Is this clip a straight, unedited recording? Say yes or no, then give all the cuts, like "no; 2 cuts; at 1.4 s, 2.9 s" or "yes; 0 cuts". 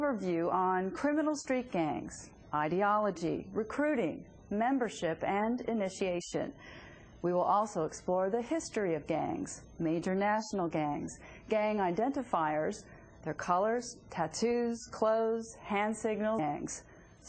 yes; 0 cuts